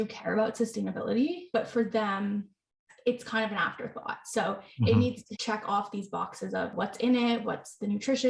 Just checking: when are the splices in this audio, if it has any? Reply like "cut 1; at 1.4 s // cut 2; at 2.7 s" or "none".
cut 1; at 1.4 s // cut 2; at 5.3 s // cut 3; at 6.7 s // cut 4; at 7.5 s